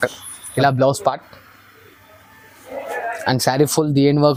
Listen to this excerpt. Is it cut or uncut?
uncut